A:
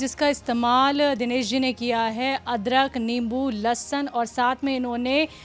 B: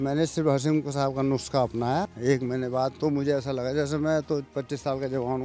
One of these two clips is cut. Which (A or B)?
B